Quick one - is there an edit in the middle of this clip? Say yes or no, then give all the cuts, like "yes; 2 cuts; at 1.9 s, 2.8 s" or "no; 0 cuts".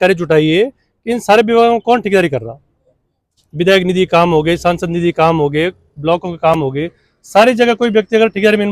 no; 0 cuts